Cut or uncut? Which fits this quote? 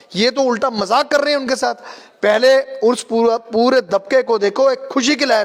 uncut